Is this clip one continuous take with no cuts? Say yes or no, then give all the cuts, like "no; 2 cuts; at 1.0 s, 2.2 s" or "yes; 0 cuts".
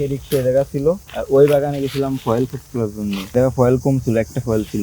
no; 2 cuts; at 1.1 s, 3.3 s